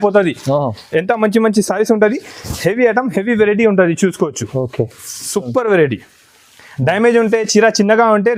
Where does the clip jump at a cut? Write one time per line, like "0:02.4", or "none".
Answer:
none